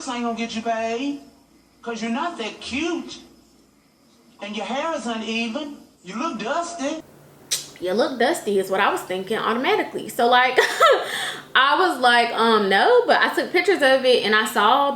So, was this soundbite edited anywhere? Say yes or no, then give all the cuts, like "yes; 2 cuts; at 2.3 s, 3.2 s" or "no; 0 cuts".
no; 0 cuts